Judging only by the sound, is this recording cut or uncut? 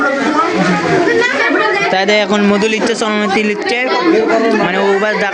uncut